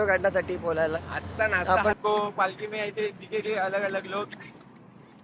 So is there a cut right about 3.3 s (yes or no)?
no